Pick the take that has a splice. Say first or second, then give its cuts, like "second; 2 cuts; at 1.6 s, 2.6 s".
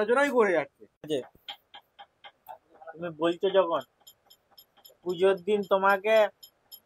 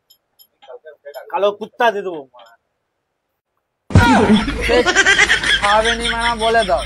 first; 1 cut; at 1.1 s